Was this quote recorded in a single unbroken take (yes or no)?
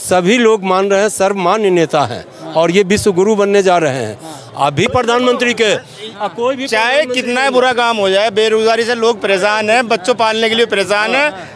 no